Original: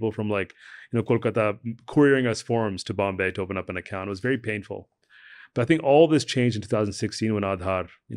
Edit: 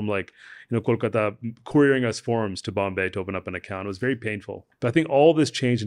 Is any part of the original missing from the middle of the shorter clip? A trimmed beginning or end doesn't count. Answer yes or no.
yes